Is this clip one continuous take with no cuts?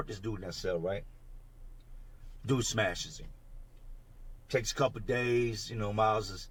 yes; 0 cuts

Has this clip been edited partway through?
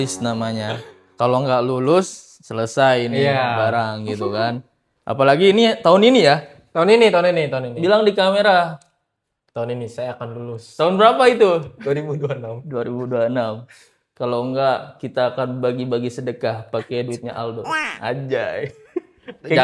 no; 0 cuts

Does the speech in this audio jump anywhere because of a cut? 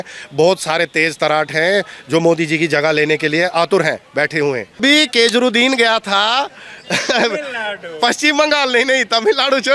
yes; 1 cut; at 4.8 s

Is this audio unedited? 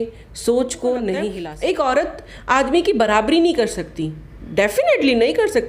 no; 1 cut; at 1.4 s

